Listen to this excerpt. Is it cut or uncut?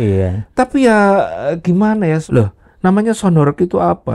cut